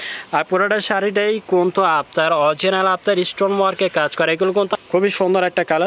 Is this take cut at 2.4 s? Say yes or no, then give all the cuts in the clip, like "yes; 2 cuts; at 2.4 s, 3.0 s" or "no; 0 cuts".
no; 1 cut; at 4.7 s